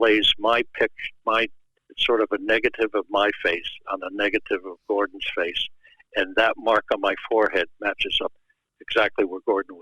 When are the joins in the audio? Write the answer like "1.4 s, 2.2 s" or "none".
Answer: 8.4 s